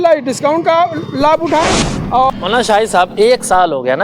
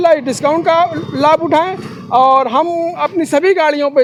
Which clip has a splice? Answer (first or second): first